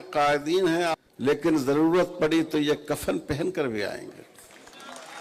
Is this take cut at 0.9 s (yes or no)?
yes